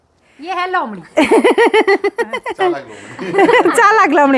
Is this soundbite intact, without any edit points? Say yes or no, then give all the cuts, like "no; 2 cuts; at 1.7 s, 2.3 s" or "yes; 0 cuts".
yes; 0 cuts